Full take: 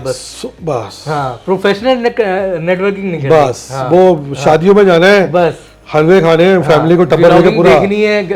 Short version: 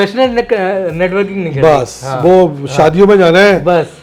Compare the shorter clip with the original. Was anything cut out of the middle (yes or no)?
no